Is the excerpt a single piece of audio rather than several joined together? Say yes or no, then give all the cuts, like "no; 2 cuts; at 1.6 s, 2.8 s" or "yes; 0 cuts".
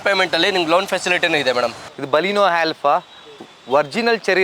no; 1 cut; at 1.9 s